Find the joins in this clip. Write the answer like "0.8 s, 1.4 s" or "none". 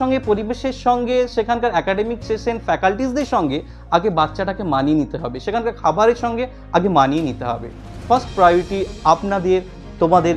none